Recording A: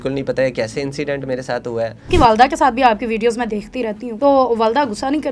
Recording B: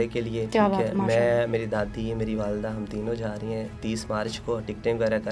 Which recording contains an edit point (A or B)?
A